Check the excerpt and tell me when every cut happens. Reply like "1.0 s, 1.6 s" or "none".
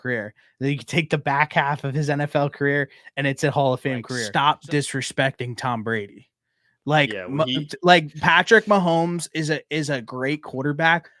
4.2 s